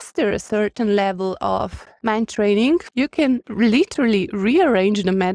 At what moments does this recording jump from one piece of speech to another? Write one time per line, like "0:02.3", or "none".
0:01.4
0:03.4